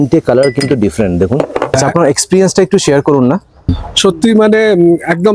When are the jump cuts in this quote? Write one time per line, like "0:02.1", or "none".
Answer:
0:01.6
0:03.7